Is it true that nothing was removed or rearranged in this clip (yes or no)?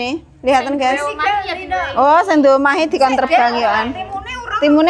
yes